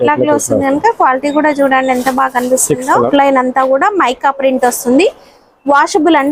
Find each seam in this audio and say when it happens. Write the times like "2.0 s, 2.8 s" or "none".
3.1 s